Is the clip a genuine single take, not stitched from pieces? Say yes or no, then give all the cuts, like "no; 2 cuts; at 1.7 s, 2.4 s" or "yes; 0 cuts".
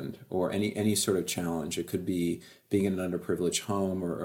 yes; 0 cuts